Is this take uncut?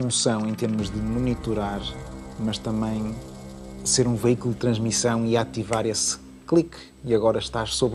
yes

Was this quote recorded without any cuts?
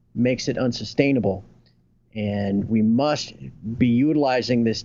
yes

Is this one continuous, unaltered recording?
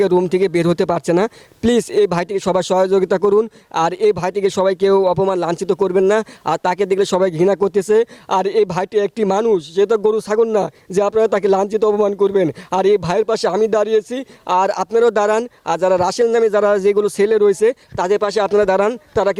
yes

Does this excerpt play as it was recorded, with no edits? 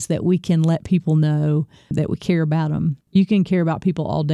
no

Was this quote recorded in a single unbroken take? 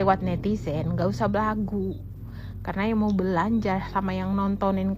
yes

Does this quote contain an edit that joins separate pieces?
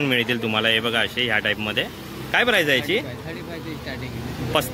no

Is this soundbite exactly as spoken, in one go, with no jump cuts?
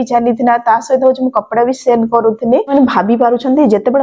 no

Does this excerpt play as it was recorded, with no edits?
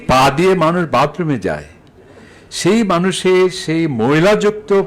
yes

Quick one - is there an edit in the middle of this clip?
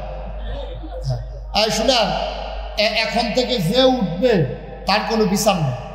no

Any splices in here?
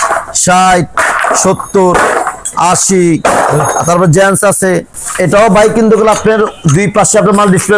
yes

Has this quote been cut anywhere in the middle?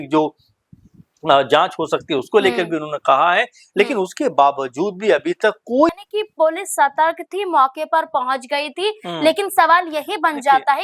yes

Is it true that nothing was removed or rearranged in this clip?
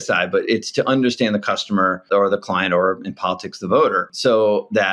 no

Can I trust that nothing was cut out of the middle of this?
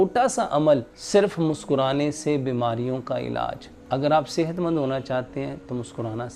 no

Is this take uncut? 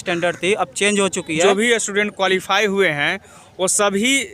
no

